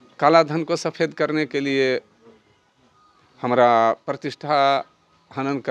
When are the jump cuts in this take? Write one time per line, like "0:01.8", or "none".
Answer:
none

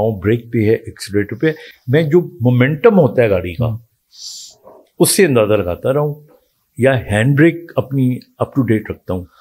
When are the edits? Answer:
none

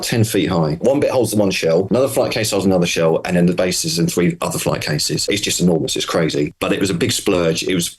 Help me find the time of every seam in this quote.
0:00.8
0:01.9
0:05.2
0:06.6

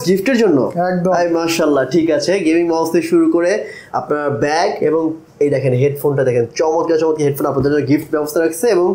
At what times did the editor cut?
none

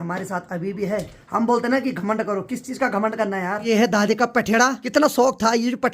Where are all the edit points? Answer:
0:01.2
0:03.7
0:04.8

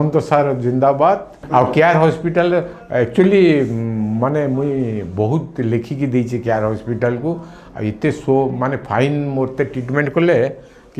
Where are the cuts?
none

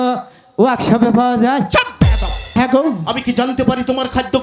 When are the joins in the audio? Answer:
0:02.5

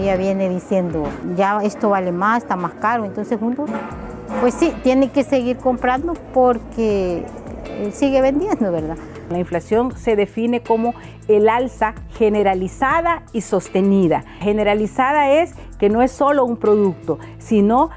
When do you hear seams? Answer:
0:01.2
0:09.1
0:14.3

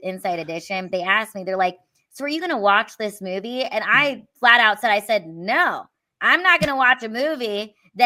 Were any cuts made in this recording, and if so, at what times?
none

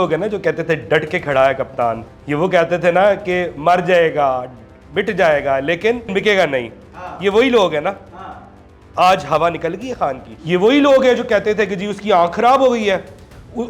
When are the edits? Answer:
0:02.0
0:06.1
0:10.3

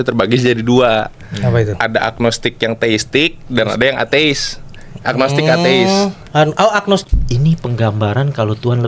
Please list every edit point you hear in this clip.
0:07.0

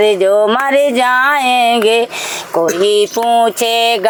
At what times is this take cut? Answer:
none

